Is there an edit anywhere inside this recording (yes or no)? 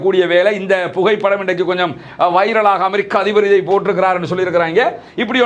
no